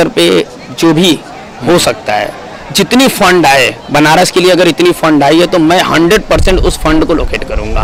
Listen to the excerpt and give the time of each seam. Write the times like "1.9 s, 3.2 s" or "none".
none